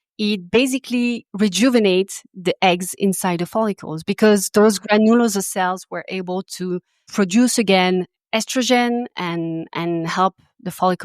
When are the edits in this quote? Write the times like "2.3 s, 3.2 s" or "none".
7.0 s